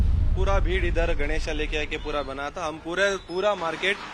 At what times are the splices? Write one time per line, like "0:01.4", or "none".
0:01.2